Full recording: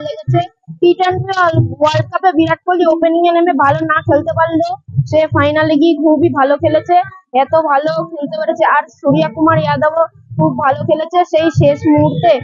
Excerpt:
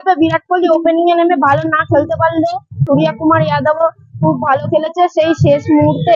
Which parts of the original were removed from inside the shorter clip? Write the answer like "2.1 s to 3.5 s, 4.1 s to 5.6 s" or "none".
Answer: 4.9 s to 8.9 s